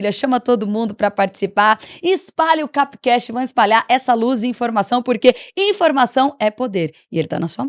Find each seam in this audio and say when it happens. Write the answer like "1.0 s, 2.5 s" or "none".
none

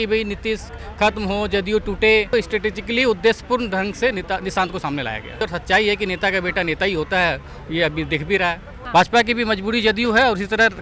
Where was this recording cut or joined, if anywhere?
2.3 s, 5.4 s, 8.8 s

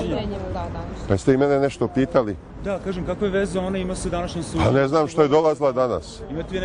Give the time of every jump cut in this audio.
3.3 s

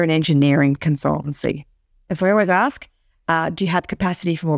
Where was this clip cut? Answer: 2.1 s

